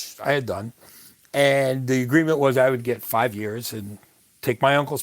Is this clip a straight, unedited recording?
yes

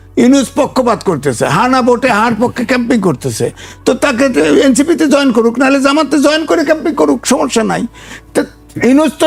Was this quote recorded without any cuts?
yes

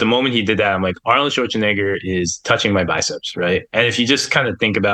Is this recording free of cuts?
yes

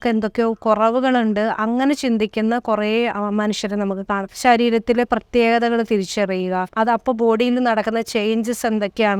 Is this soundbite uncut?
no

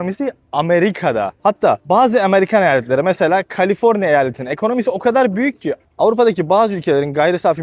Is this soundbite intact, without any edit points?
yes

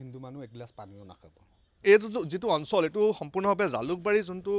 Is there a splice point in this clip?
yes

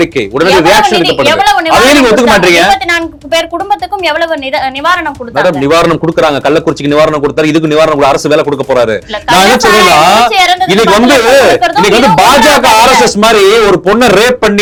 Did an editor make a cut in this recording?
no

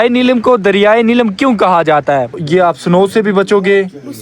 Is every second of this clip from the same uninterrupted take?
no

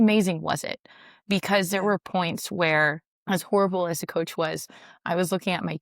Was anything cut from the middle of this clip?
yes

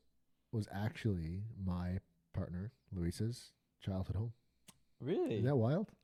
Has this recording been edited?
no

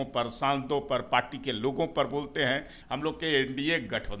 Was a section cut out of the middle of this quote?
yes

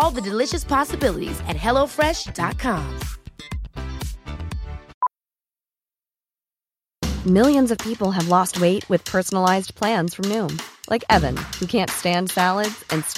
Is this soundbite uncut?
no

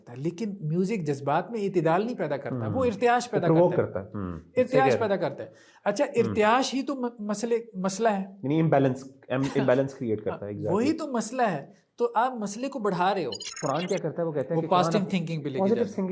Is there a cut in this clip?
yes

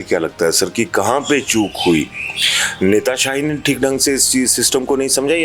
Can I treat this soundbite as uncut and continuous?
yes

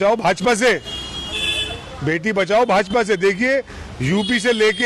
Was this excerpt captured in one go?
yes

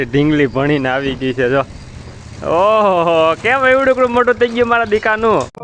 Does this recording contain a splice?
no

